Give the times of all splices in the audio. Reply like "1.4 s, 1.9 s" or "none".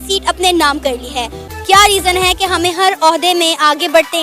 1.4 s